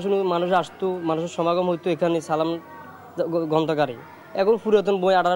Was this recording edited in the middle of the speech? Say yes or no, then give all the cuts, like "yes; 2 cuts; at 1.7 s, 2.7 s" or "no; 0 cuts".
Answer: no; 0 cuts